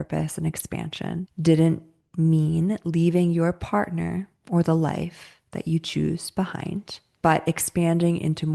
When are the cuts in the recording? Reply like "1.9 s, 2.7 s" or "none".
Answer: 1.3 s